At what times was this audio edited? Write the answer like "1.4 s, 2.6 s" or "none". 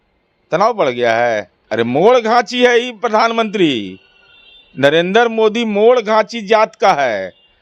1.6 s

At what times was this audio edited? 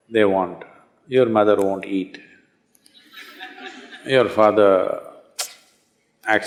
none

